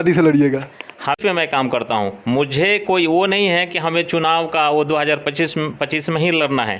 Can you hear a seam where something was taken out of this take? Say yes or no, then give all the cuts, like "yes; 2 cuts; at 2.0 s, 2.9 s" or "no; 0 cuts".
yes; 1 cut; at 1.2 s